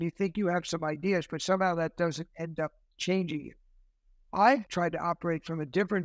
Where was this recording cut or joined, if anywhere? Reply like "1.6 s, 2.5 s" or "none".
4.7 s